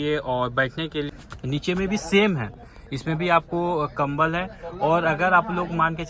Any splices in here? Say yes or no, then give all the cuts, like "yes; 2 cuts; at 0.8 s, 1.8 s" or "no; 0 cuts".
yes; 1 cut; at 1.1 s